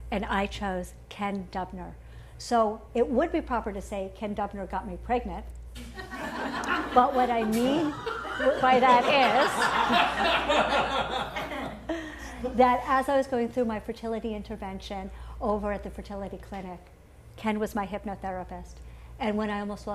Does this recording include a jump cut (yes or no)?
yes